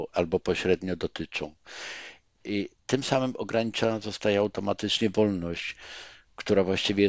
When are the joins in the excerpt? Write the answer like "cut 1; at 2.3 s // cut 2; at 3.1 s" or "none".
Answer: none